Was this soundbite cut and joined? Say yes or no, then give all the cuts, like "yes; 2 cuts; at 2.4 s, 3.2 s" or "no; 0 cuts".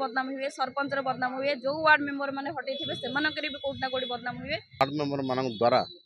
yes; 1 cut; at 4.8 s